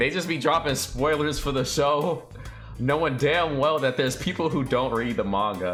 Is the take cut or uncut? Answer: uncut